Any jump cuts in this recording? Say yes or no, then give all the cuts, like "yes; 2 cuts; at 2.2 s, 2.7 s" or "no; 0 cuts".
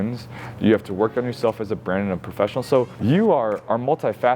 yes; 1 cut; at 2.9 s